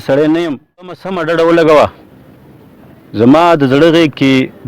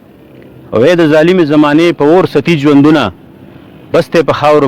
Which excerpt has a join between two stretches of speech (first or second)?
first